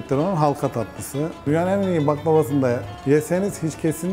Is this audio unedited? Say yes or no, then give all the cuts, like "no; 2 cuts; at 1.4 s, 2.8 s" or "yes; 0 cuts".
no; 2 cuts; at 1.4 s, 2.9 s